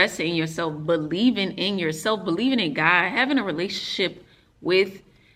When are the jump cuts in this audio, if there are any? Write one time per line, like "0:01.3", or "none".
none